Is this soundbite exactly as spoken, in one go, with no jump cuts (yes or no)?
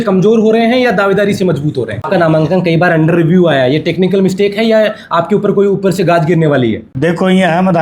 no